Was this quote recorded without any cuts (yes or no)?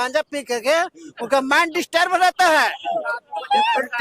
yes